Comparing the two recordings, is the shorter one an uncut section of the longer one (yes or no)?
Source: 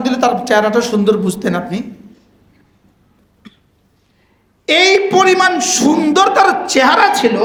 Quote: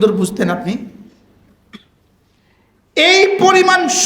no